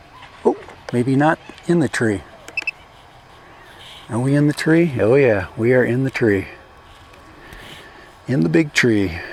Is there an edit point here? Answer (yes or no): no